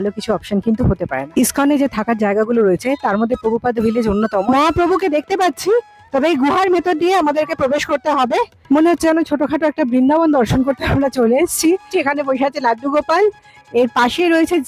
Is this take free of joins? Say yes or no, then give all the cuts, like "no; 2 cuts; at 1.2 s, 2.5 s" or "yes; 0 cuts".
no; 4 cuts; at 1.2 s, 4.4 s, 8.5 s, 11.9 s